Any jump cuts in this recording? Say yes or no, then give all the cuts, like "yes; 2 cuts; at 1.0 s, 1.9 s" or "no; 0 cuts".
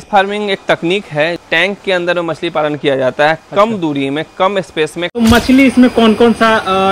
yes; 2 cuts; at 1.4 s, 5.1 s